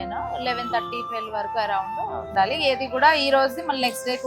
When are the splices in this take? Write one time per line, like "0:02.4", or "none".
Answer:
0:02.2